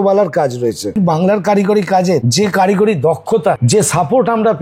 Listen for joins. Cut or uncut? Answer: cut